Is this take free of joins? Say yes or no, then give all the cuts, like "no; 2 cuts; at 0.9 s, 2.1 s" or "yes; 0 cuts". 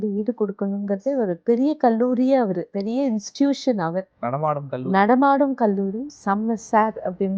no; 3 cuts; at 1.4 s, 2.7 s, 6.1 s